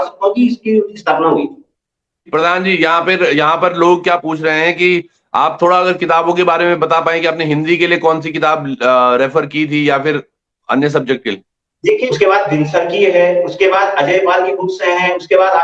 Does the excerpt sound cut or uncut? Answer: cut